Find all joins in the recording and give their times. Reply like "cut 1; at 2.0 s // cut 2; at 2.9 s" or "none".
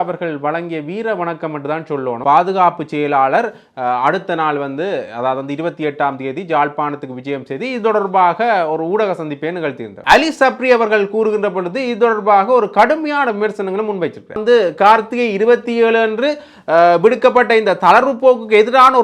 cut 1; at 2.2 s // cut 2; at 10.0 s // cut 3; at 14.4 s